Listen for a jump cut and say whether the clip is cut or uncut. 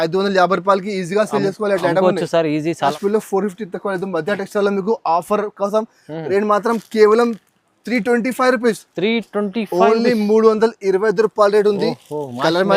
cut